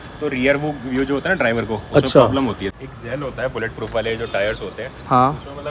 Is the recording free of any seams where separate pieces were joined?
no; 1 cut; at 2.7 s

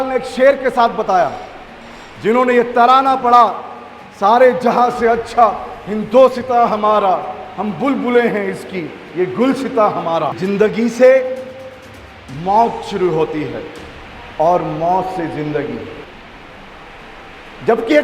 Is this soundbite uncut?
no; 2 cuts; at 10.4 s, 16.0 s

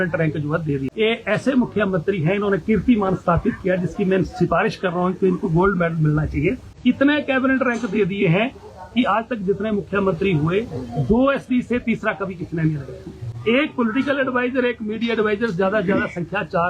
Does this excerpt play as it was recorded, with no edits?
no; 2 cuts; at 0.9 s, 6.7 s

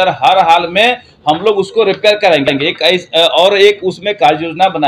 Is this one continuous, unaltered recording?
yes; 0 cuts

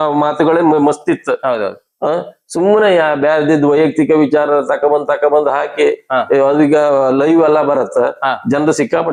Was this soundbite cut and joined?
no; 0 cuts

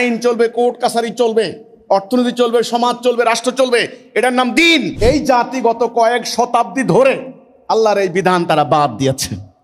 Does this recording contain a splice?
yes; 1 cut; at 4.9 s

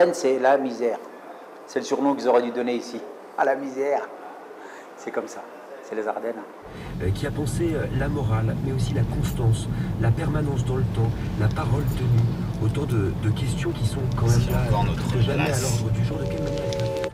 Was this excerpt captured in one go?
yes; 0 cuts

